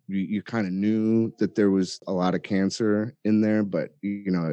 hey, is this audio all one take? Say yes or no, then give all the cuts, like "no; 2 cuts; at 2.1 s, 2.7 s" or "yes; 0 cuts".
no; 1 cut; at 2.0 s